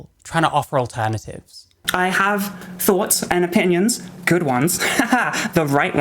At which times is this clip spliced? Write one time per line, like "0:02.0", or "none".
0:01.8